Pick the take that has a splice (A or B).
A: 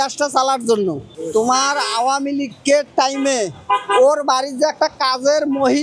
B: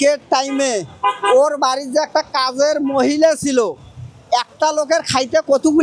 A